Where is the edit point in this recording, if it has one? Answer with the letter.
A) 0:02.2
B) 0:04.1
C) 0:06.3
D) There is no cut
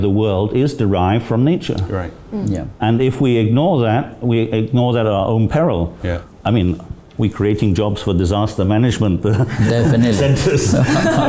C